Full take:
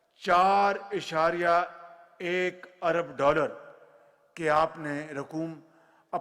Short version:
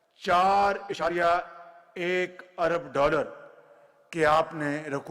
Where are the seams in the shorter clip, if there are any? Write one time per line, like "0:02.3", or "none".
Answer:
0:01.1